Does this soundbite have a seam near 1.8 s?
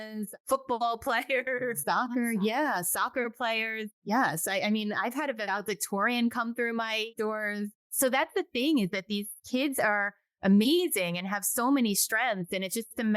yes; 1 cut; at 1.8 s

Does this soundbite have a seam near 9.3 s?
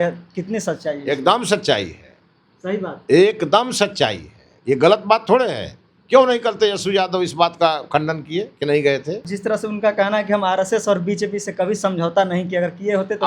yes; 1 cut; at 9.3 s

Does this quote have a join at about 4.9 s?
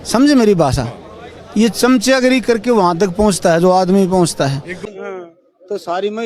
yes; 1 cut; at 4.9 s

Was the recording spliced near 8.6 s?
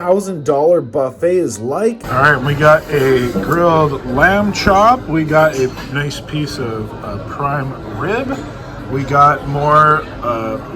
no; 1 cut; at 2.0 s

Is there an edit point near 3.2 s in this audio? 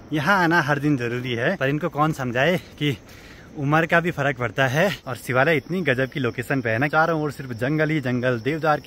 no; 3 cuts; at 1.6 s, 5.1 s, 6.9 s

